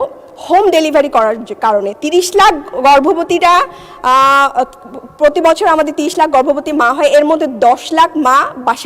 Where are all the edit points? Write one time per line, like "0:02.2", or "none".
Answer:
none